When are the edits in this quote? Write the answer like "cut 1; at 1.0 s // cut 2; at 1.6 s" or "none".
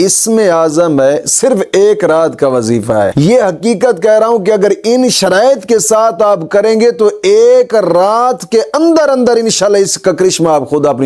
none